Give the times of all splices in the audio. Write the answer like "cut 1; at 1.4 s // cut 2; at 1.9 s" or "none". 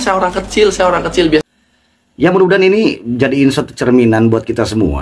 cut 1; at 1.4 s